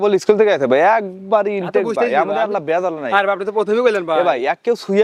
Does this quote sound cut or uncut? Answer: uncut